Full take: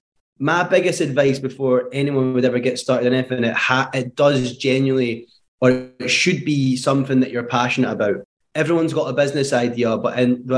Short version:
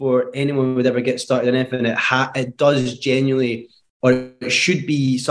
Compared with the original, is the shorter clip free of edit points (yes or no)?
yes